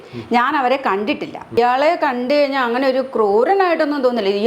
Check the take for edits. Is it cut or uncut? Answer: cut